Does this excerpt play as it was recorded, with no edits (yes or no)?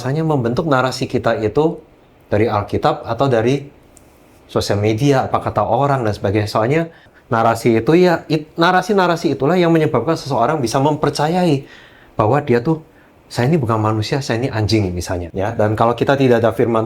no